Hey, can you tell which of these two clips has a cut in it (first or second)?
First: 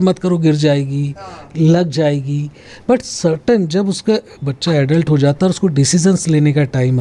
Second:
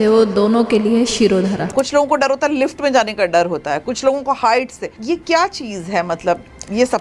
second